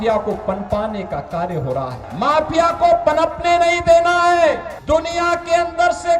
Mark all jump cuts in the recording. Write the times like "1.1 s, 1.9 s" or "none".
2.0 s, 4.7 s